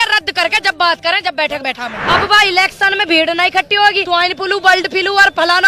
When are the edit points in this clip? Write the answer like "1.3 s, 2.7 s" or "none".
2.0 s, 4.0 s